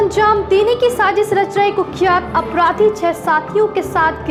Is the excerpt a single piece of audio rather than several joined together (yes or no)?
yes